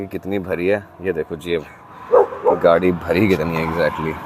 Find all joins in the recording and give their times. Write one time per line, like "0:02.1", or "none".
none